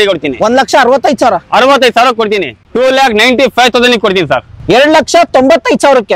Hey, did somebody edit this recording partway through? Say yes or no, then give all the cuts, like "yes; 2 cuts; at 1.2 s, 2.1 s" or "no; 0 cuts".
yes; 1 cut; at 2.7 s